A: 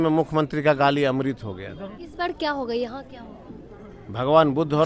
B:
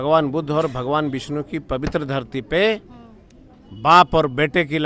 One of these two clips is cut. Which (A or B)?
A